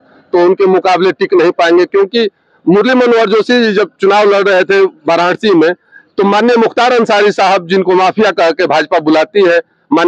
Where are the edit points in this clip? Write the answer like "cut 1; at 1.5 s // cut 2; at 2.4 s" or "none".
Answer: none